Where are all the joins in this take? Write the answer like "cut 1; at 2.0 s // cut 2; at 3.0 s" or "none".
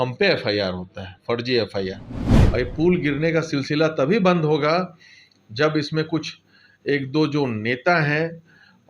cut 1; at 2.3 s